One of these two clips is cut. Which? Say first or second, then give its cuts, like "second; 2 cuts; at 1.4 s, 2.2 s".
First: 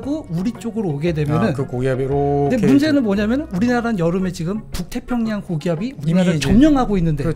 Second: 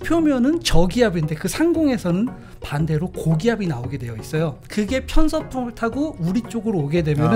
second; 1 cut; at 4.6 s